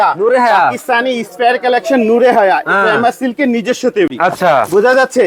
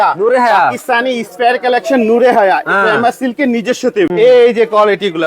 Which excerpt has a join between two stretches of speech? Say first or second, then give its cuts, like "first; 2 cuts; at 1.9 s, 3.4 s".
second; 1 cut; at 4.1 s